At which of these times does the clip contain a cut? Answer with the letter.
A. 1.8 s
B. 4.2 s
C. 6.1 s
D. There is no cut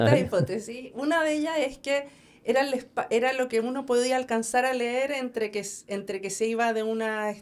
D